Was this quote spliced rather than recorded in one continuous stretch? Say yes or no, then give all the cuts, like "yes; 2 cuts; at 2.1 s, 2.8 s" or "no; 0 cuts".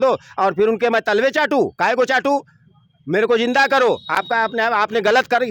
no; 0 cuts